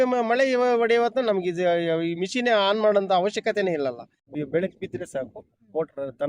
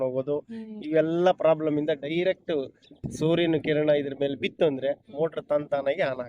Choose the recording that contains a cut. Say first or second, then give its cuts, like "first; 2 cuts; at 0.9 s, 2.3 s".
first; 1 cut; at 4.3 s